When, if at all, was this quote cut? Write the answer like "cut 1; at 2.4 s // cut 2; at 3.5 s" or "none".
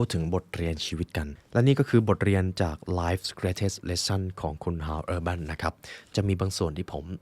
cut 1; at 1.4 s